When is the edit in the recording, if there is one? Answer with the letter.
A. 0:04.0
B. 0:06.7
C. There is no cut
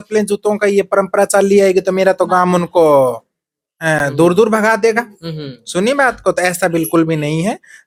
C